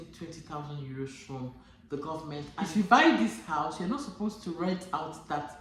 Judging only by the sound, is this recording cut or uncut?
cut